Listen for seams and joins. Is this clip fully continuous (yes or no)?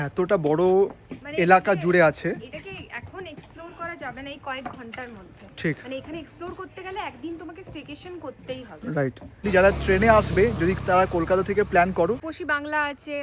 no